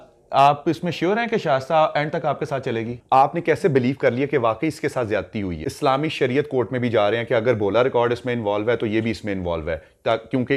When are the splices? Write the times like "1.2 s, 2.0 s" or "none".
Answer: 3.0 s, 5.6 s

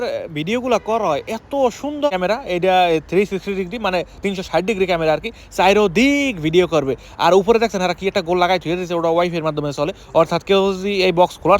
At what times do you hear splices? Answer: 2.1 s

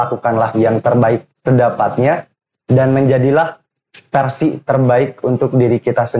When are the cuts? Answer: none

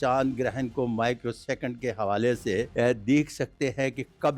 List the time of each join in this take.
2.7 s

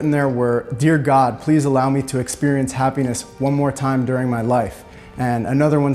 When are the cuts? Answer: none

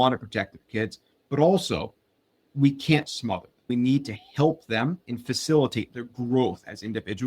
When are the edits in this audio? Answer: 3.6 s

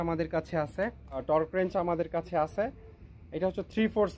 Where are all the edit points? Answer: 1.2 s

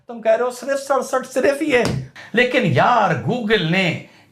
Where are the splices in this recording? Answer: 2.0 s

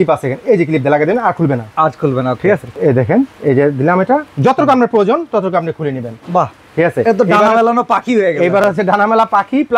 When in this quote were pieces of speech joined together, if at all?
none

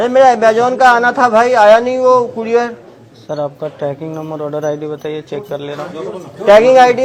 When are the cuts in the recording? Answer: none

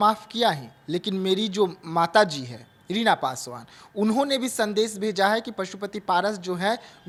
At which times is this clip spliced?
none

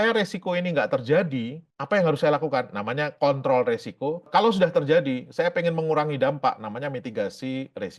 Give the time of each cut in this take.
4.2 s

